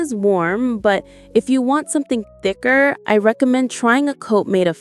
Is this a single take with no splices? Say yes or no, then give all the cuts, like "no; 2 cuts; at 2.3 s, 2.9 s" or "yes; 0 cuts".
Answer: no; 1 cut; at 3.0 s